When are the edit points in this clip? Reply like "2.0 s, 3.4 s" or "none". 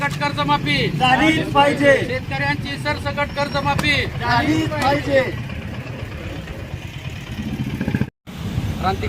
8.0 s